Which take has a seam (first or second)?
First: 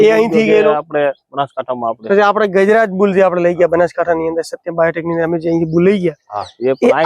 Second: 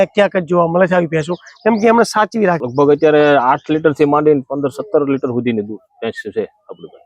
second